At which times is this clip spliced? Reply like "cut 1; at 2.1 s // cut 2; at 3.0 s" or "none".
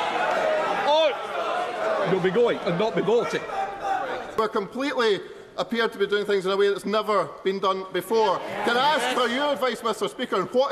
cut 1; at 4.3 s